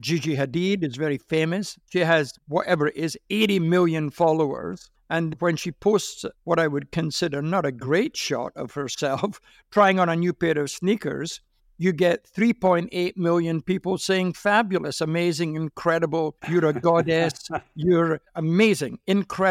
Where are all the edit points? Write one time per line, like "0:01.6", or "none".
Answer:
0:02.1
0:18.3